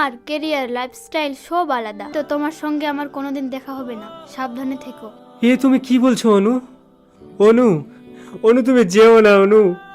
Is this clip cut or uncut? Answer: cut